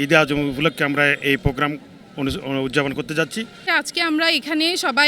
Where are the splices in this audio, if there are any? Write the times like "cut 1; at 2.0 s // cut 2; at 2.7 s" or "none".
cut 1; at 3.7 s